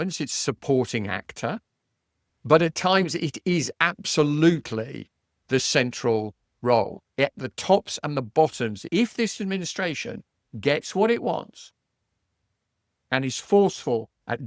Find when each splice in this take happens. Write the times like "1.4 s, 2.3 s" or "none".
8.8 s